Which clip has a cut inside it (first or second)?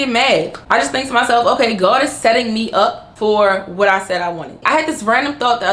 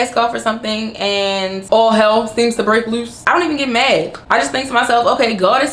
second